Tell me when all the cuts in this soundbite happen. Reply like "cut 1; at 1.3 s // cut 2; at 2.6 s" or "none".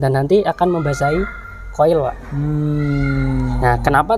none

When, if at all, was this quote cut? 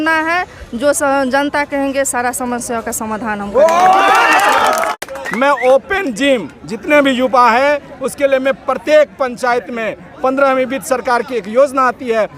cut 1; at 5.0 s

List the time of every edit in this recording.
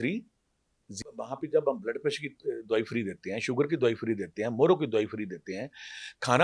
cut 1; at 1.0 s

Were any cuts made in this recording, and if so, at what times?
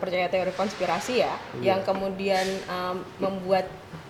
none

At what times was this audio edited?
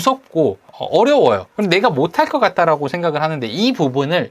none

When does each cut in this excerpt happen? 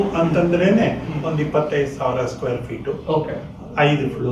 none

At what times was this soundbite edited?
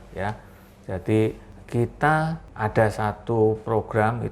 cut 1; at 1.5 s // cut 2; at 2.4 s

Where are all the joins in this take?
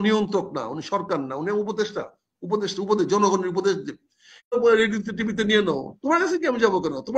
cut 1; at 4.5 s

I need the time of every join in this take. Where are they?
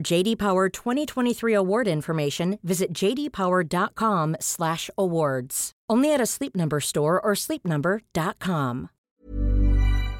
cut 1; at 9.0 s

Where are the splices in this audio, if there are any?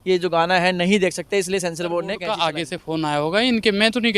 cut 1; at 2.4 s

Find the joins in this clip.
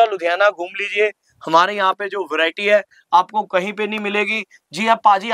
none

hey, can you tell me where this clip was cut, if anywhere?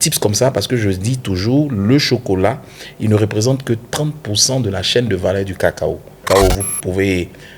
cut 1; at 6.2 s

